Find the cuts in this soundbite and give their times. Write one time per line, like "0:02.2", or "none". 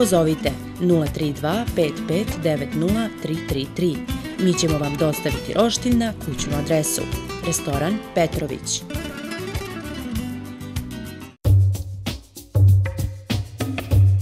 0:11.2